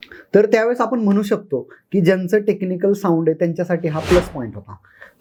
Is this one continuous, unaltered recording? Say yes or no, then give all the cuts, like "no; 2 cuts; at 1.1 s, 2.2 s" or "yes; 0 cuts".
yes; 0 cuts